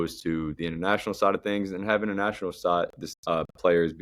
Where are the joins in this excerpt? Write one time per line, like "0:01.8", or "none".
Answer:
none